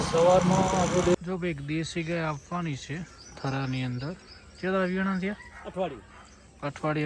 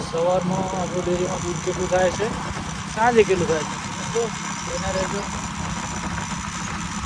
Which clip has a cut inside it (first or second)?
first